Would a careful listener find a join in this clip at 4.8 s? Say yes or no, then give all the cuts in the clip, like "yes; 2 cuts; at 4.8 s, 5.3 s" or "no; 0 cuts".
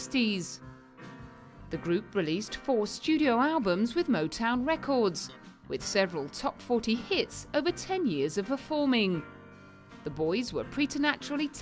yes; 1 cut; at 4.8 s